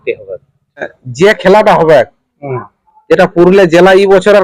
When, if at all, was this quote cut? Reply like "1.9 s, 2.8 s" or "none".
1.0 s